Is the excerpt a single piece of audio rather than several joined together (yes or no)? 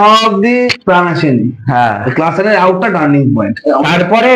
yes